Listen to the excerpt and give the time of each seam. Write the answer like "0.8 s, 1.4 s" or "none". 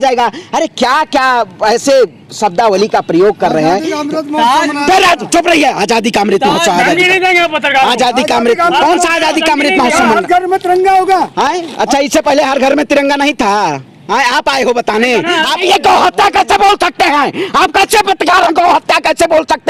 15.6 s